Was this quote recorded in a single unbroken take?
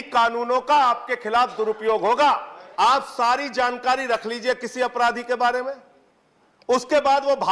no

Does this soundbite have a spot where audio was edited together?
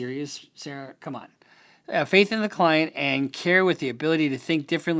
no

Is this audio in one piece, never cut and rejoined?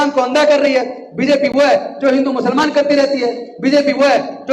yes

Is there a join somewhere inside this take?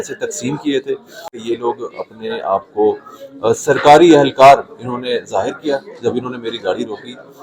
yes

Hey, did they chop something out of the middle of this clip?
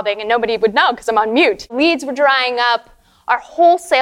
yes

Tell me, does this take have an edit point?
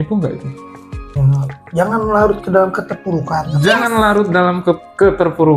yes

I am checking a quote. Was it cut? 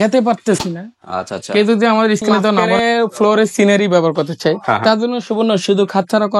yes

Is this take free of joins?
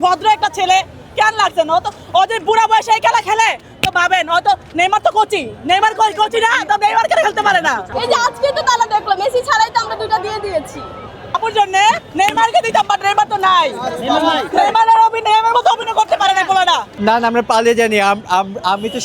no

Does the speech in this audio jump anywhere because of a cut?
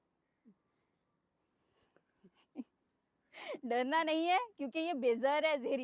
no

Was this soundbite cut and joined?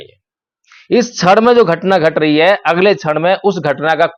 no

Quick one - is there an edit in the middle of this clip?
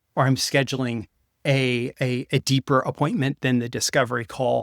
no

